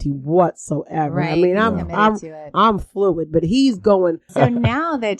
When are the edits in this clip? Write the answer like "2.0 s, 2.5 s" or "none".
4.3 s